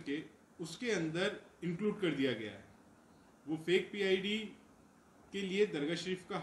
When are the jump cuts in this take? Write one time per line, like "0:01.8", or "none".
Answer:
none